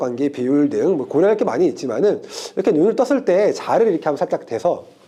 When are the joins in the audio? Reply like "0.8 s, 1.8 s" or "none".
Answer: none

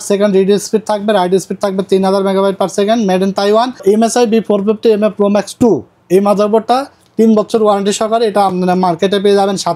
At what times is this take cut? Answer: 3.8 s

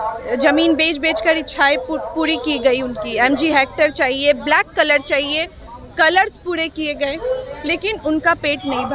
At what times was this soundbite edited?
none

